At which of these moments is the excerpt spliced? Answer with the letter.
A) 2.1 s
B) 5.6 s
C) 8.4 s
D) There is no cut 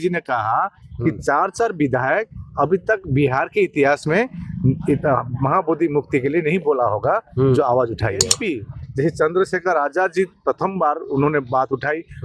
C